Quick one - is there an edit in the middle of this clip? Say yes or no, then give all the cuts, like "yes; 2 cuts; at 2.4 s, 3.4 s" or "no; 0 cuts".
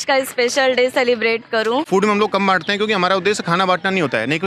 yes; 1 cut; at 1.9 s